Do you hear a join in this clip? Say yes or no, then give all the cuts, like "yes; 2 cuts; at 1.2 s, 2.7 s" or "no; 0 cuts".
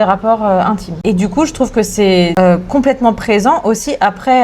yes; 2 cuts; at 1.0 s, 2.3 s